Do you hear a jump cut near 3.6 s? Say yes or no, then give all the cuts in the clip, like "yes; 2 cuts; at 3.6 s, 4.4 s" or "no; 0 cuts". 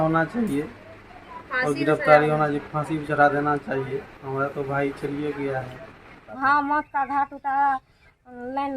no; 1 cut; at 6.3 s